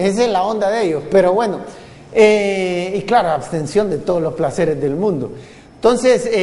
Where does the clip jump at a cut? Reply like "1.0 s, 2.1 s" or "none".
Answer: 1.7 s